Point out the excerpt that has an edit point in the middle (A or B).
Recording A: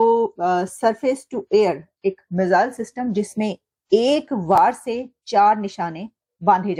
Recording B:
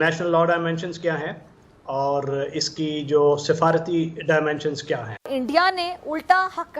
B